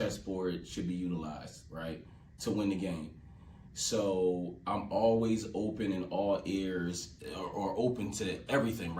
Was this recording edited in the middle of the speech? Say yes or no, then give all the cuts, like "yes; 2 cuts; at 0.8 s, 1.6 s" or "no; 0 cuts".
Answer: no; 0 cuts